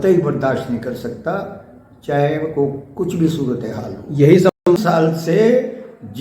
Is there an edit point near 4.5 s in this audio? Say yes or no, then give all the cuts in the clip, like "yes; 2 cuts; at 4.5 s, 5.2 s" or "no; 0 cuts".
yes; 1 cut; at 4.5 s